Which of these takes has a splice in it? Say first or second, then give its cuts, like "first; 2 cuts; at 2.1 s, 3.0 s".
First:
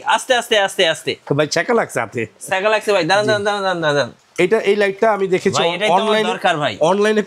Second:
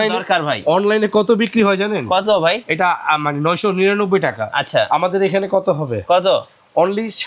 first; 1 cut; at 4.2 s